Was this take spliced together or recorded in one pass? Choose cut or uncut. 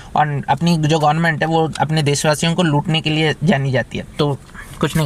uncut